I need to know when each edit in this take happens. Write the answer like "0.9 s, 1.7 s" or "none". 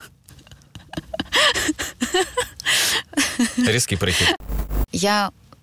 4.5 s